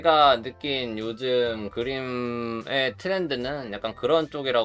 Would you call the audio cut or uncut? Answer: uncut